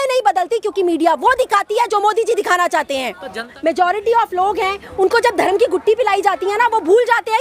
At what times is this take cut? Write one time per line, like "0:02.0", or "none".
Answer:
0:03.5